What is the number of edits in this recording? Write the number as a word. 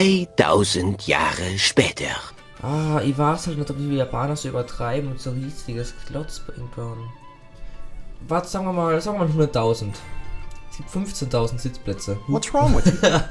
zero